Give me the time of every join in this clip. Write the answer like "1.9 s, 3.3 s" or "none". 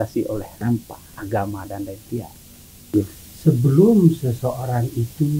2.9 s

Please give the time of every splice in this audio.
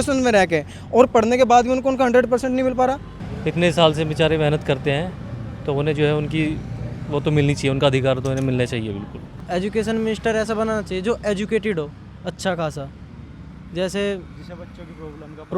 3.1 s, 9.4 s

